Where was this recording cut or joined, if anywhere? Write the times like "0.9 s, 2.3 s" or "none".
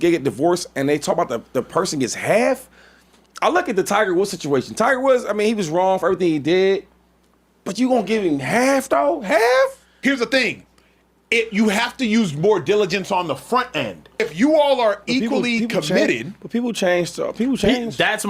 9.9 s, 14.2 s